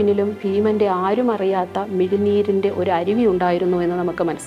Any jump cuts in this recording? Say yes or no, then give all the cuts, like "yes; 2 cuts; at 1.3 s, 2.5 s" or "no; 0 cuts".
no; 0 cuts